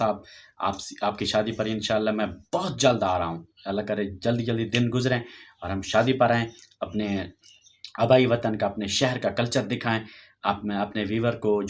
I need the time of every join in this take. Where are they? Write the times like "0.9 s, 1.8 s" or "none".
none